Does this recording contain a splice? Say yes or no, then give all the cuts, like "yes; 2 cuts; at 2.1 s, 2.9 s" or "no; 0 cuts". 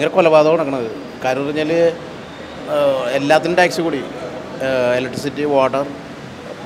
no; 0 cuts